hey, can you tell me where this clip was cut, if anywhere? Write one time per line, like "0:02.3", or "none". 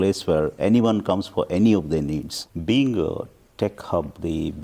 0:02.5